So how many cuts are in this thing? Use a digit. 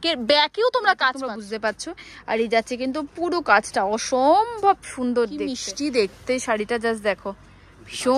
2